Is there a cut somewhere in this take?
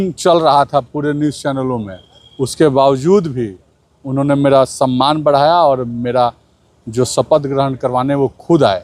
no; 0 cuts

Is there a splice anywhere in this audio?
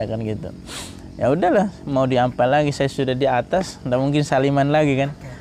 no; 0 cuts

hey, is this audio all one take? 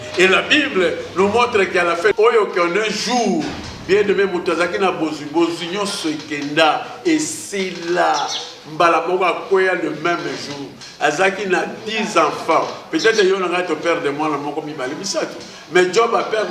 no; 1 cut; at 2.1 s

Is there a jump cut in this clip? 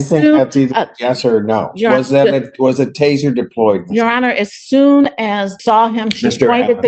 yes; 1 cut; at 5.5 s

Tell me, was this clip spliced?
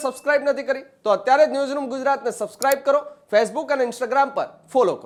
no; 0 cuts

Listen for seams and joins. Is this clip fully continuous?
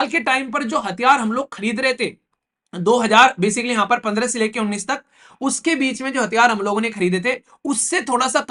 yes; 0 cuts

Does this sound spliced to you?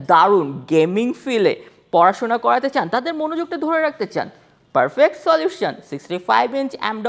no; 0 cuts

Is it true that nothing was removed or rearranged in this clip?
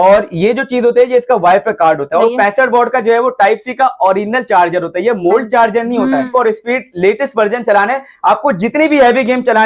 no; 2 cuts; at 2.2 s, 6.3 s

